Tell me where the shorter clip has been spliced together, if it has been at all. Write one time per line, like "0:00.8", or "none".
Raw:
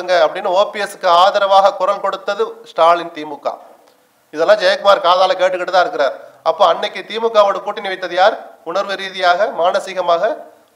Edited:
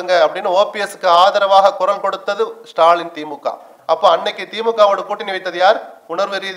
0:03.7